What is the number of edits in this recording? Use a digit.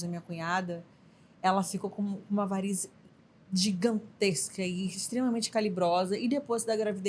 0